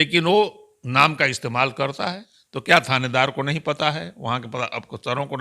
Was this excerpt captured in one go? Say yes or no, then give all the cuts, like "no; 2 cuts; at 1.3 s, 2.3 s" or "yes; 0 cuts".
no; 1 cut; at 2.3 s